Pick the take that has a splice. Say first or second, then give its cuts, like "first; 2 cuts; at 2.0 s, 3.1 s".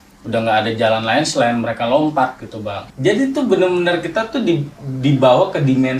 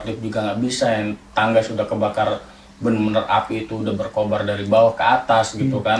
first; 1 cut; at 2.8 s